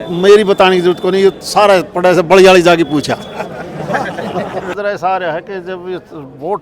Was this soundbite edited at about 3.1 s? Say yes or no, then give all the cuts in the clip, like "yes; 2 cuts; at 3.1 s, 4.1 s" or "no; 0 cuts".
no; 1 cut; at 4.8 s